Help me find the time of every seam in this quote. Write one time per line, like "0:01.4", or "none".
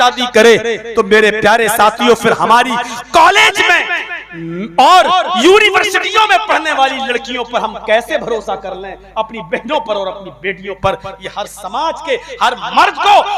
none